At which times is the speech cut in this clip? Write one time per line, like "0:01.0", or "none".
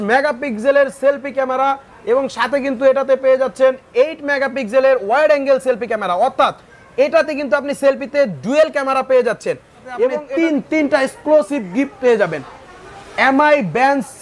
0:10.2